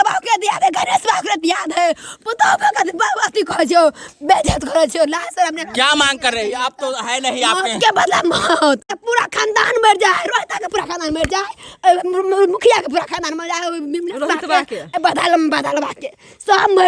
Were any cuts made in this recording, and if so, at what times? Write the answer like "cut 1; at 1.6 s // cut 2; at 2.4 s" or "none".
cut 1; at 8.9 s